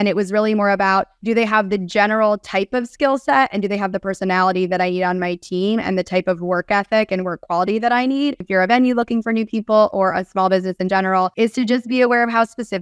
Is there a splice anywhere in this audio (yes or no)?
yes